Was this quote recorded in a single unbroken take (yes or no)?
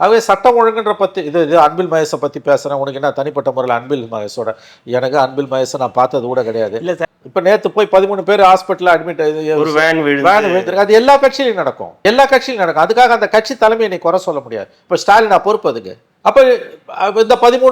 no